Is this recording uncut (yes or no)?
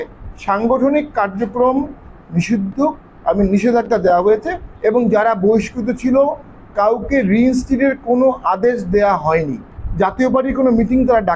no